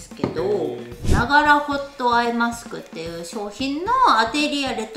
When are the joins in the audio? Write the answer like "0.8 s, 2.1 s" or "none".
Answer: 1.0 s

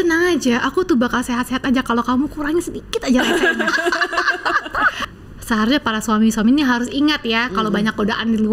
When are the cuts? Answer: 5.1 s

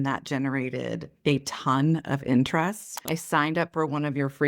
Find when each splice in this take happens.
3.1 s

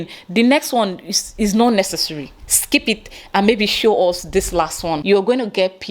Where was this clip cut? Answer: 5.0 s

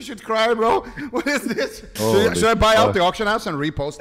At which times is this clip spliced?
1.9 s

